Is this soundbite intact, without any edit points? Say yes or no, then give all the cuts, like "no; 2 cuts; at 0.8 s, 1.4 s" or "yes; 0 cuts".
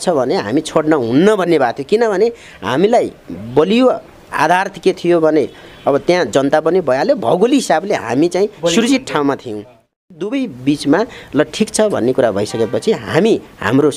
no; 1 cut; at 9.8 s